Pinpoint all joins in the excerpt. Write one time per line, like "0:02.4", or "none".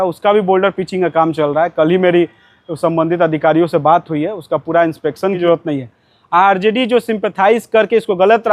0:05.4